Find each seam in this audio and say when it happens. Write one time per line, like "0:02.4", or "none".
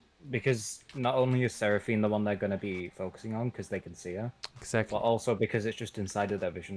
none